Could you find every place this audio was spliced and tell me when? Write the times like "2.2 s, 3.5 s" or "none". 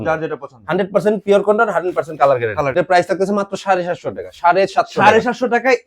2.7 s